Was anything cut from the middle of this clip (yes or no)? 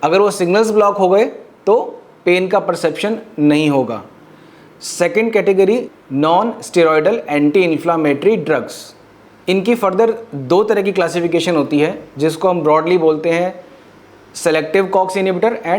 no